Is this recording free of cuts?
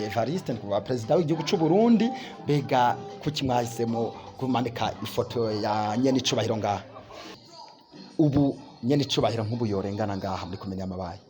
no; 1 cut; at 7.3 s

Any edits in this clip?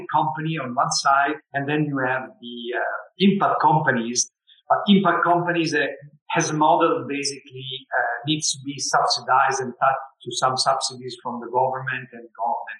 no; 0 cuts

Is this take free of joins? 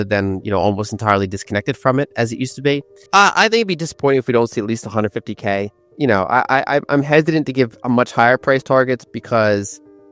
no; 2 cuts; at 2.9 s, 5.8 s

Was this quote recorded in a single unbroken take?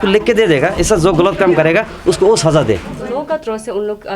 no; 1 cut; at 3.3 s

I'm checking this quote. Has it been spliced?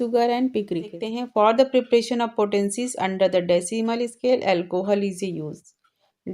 yes; 1 cut; at 1.0 s

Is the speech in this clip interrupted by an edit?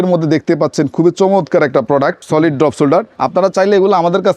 yes; 2 cuts; at 2.2 s, 3.2 s

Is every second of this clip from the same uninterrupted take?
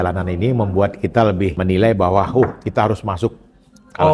no; 1 cut; at 1.6 s

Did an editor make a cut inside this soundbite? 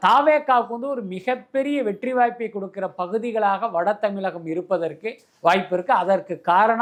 no; 0 cuts

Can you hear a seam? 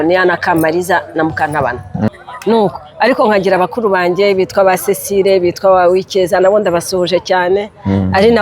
yes; 1 cut; at 2.1 s

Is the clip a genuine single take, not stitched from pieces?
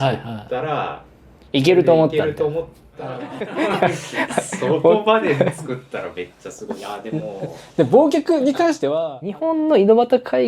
no; 2 cuts; at 2.9 s, 8.9 s

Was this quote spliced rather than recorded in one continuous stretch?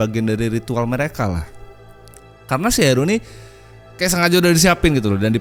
no; 0 cuts

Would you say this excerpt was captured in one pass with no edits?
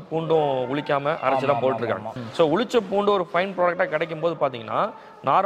no; 1 cut; at 2.1 s

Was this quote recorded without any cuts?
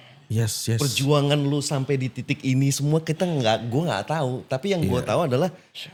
yes; 0 cuts

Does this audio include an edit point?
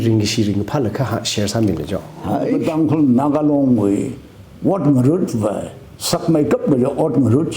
yes; 1 cut; at 2.6 s

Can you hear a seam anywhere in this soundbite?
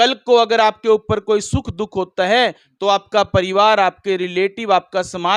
no; 0 cuts

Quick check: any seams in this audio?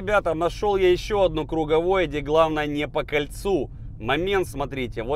no; 0 cuts

